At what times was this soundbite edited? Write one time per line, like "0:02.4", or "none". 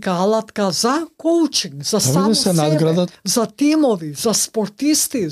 0:03.2